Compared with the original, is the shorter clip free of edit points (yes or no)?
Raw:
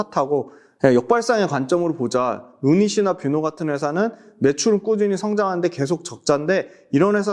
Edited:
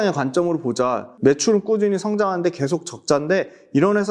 no